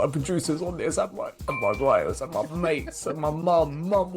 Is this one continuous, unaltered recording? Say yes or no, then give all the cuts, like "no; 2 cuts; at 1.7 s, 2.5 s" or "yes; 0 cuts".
yes; 0 cuts